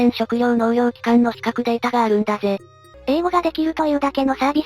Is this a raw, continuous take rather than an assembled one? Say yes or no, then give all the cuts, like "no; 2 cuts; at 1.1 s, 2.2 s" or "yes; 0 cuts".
no; 1 cut; at 2.8 s